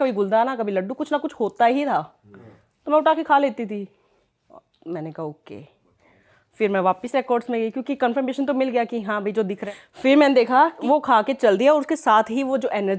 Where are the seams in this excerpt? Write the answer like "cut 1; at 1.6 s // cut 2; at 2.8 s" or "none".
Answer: cut 1; at 9.6 s // cut 2; at 10.8 s